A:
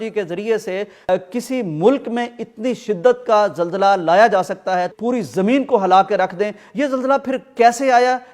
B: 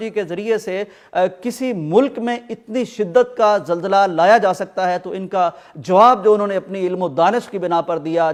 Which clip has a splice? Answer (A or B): A